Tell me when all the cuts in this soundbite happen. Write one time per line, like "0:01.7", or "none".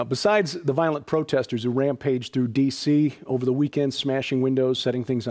0:03.4